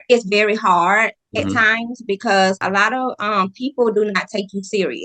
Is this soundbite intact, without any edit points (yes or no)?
no